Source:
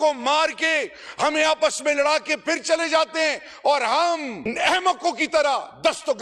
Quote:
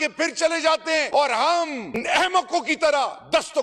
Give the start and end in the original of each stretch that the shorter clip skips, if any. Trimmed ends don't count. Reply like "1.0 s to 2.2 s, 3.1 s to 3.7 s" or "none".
3.3 s to 3.6 s